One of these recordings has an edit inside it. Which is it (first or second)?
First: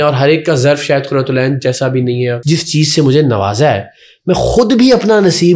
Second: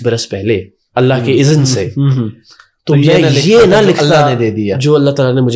first